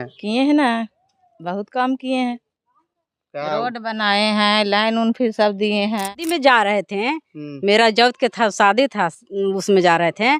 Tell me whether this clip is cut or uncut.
cut